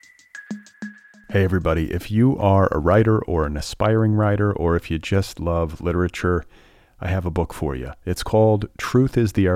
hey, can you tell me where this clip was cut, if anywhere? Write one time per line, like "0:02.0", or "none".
0:00.9

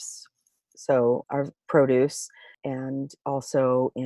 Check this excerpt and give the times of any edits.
0:01.2
0:02.5

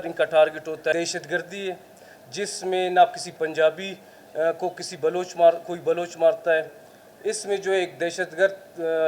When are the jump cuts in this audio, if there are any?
0:00.9

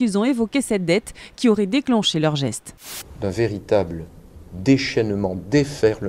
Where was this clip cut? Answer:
0:02.7

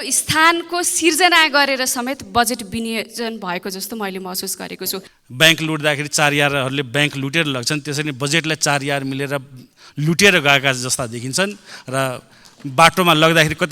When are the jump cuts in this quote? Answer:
0:05.1

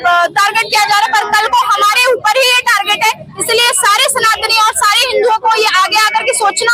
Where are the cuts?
none

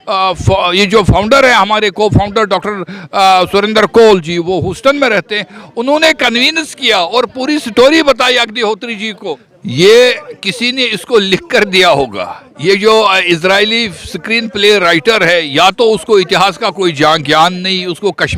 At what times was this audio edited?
0:09.5

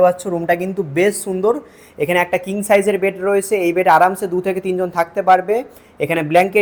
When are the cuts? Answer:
none

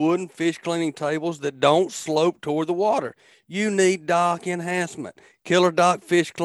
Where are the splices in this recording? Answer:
none

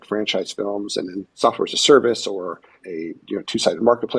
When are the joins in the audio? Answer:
0:01.3
0:02.8

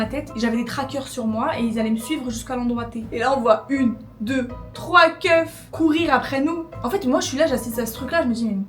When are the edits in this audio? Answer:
0:03.1
0:06.7

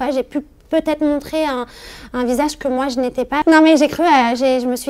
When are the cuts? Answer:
0:03.4

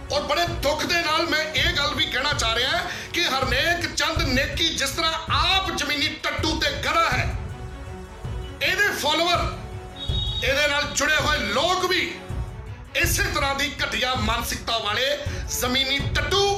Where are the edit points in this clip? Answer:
none

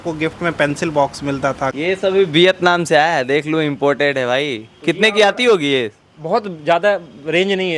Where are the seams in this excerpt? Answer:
0:01.7

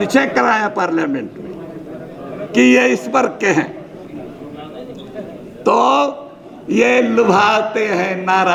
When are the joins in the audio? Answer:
none

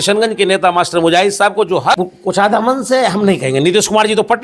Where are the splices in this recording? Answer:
0:01.8

